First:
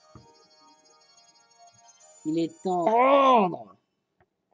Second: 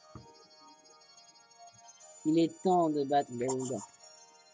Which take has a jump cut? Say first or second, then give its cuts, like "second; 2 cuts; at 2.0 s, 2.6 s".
second; 1 cut; at 2.9 s